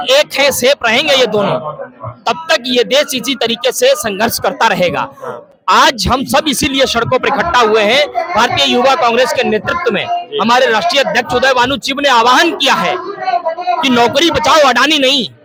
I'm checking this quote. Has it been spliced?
no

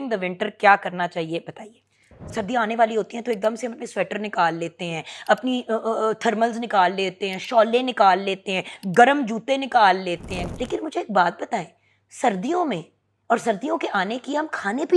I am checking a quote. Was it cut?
yes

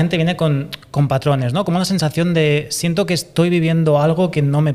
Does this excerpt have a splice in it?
no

